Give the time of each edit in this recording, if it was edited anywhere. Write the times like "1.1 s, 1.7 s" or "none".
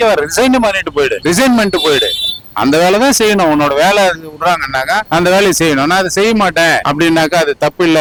none